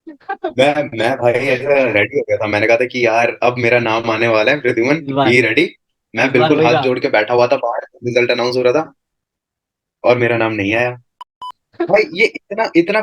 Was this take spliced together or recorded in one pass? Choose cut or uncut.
cut